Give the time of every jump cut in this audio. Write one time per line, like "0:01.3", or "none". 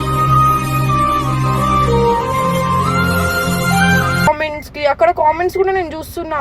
0:04.3